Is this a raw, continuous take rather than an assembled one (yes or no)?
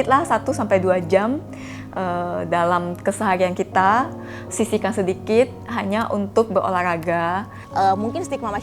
no